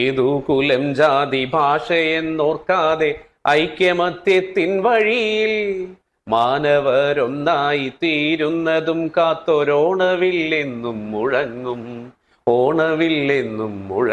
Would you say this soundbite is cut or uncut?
uncut